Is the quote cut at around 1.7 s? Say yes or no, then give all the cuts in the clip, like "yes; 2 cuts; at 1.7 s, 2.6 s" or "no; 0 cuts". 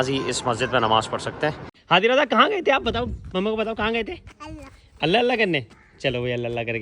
yes; 1 cut; at 1.7 s